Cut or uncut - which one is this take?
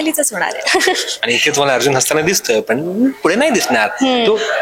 uncut